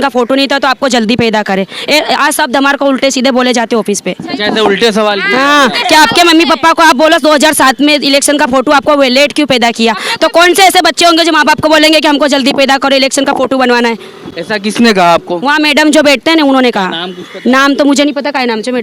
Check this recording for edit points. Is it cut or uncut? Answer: uncut